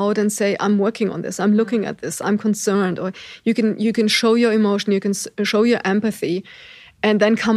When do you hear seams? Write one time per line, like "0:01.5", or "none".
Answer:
none